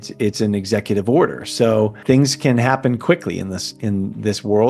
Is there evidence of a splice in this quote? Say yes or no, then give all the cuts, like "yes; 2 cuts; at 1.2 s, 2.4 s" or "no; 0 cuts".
yes; 1 cut; at 2.0 s